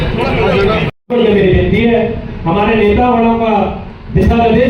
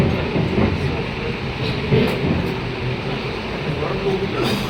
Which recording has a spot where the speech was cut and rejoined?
first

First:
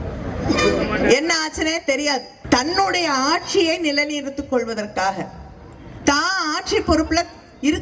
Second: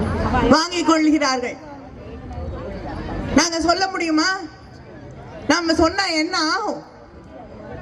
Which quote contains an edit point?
first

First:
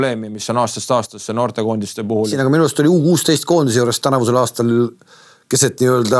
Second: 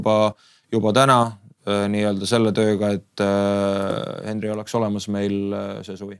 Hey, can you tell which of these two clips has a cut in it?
first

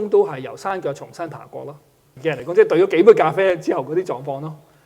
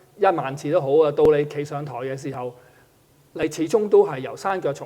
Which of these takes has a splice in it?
first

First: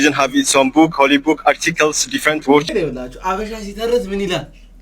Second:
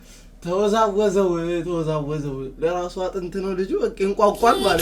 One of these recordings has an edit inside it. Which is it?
first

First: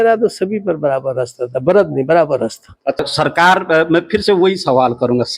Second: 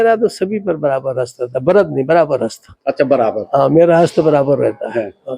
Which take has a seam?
first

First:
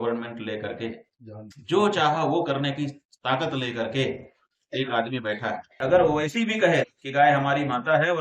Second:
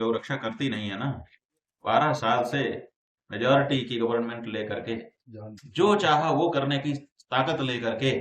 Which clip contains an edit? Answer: first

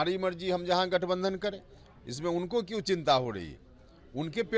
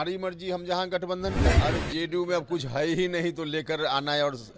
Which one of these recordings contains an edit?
second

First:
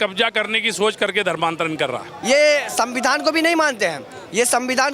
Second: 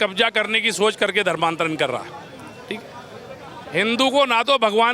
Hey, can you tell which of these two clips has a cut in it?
first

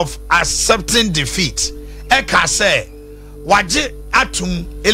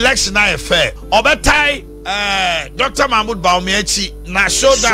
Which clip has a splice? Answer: second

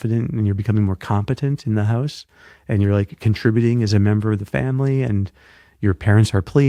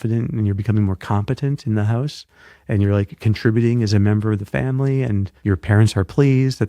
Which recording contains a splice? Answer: second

